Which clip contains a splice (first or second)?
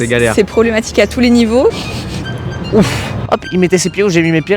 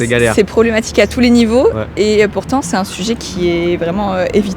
first